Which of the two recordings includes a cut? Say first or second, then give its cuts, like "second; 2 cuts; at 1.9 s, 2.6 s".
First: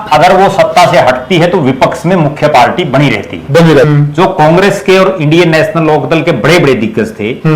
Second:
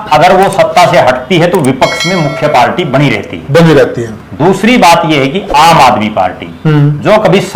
first; 1 cut; at 3.9 s